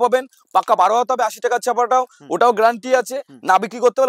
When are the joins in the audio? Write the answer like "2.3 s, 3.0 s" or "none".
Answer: none